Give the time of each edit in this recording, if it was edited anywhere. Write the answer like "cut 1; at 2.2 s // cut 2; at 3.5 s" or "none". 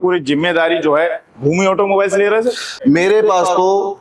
cut 1; at 2.7 s